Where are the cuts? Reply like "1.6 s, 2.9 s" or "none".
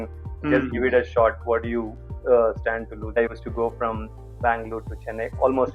3.1 s